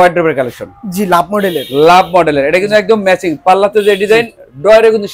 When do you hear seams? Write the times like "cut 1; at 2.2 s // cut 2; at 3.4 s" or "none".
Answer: none